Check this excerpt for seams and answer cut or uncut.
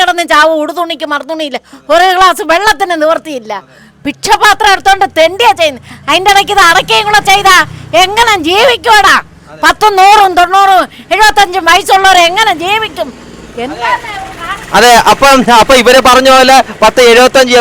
uncut